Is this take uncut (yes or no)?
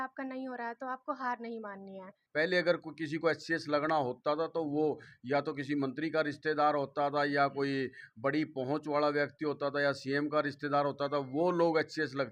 no